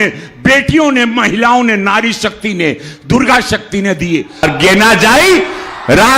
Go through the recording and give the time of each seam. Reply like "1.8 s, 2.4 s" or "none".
4.5 s